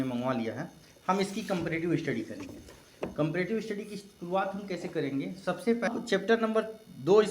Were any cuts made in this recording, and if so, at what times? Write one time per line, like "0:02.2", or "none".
0:05.9